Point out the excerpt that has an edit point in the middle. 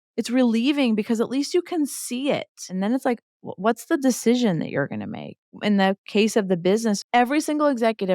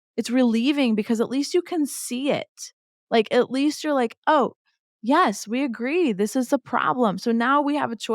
first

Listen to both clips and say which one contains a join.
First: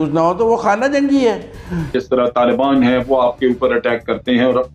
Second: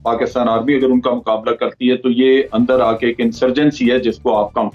first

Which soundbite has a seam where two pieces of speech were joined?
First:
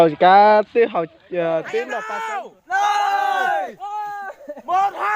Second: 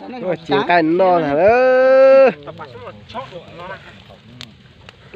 first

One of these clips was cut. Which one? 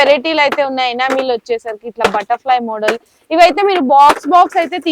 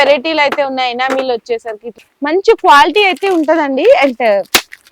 second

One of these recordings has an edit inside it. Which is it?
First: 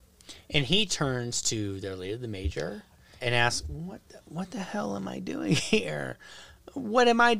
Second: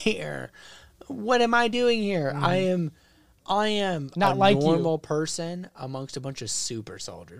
first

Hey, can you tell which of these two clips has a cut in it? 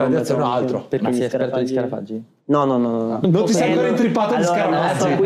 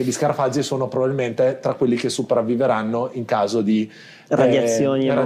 first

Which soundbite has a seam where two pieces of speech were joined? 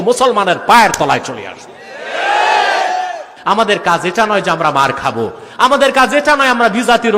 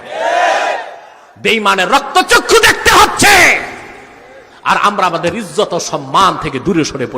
first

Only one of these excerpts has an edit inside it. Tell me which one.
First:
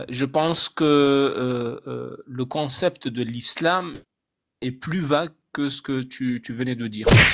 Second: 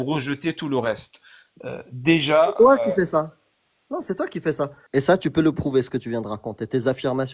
second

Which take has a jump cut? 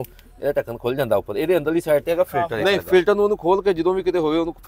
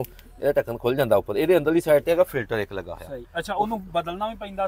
first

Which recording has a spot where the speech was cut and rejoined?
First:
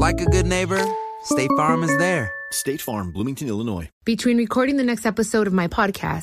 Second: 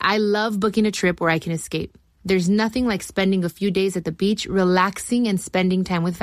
first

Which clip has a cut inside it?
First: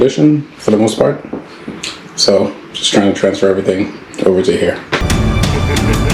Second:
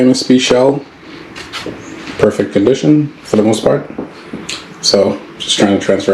first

